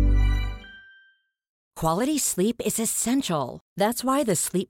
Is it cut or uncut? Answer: cut